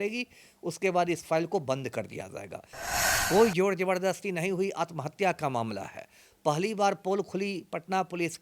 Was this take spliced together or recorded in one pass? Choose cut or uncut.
cut